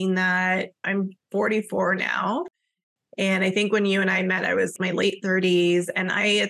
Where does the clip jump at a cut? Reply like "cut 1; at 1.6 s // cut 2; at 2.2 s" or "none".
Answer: cut 1; at 0.8 s // cut 2; at 4.7 s